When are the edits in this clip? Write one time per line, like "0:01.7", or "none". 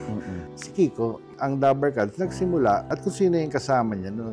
0:01.3
0:02.9